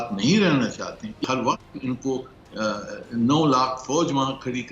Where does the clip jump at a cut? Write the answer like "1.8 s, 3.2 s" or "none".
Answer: 1.2 s